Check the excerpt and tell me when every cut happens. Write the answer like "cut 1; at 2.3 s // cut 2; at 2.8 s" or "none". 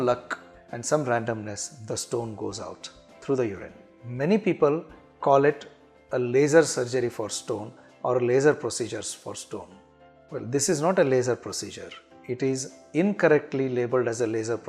cut 1; at 4.0 s